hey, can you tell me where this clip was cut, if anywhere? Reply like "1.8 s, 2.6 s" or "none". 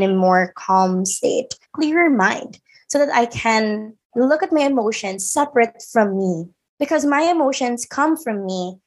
1.6 s